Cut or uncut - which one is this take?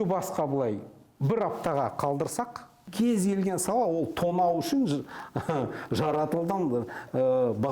cut